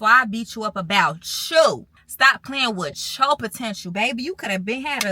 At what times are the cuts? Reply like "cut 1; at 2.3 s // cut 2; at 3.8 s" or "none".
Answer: cut 1; at 2.0 s